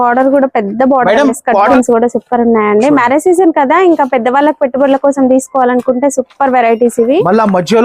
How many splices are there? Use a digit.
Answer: 1